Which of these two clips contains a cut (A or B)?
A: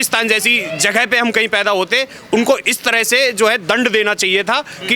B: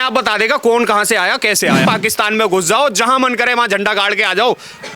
B